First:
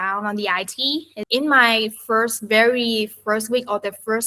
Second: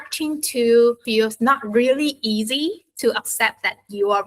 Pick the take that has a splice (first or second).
first